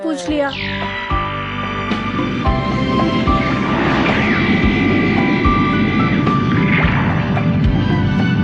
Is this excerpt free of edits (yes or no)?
yes